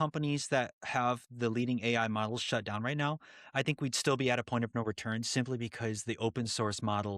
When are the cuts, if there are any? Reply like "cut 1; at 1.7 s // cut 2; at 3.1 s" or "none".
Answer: none